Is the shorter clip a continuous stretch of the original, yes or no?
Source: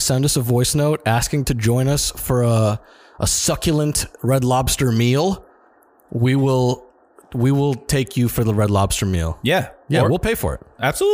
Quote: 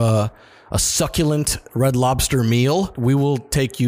no